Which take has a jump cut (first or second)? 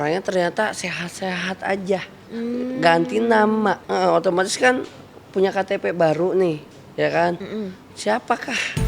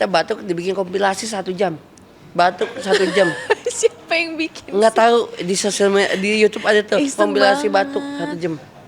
first